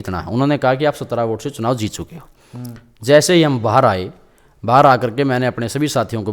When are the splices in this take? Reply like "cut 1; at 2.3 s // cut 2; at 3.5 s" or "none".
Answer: none